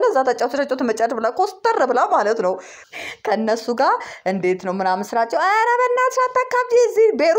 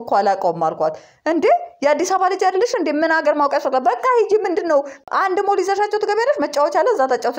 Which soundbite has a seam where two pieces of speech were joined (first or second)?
first